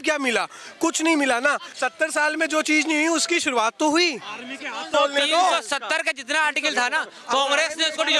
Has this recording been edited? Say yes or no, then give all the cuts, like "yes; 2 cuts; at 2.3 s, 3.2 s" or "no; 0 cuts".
yes; 2 cuts; at 1.7 s, 4.9 s